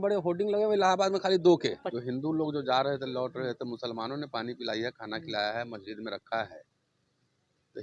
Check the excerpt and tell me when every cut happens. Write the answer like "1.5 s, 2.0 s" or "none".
1.9 s